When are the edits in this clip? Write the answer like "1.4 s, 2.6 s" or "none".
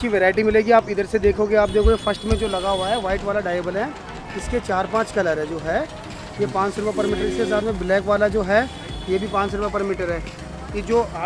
none